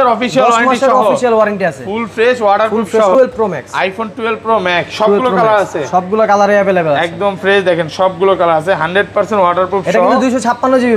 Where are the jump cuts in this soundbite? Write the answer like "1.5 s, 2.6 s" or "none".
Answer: 3.1 s

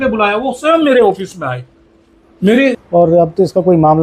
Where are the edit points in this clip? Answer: 2.8 s

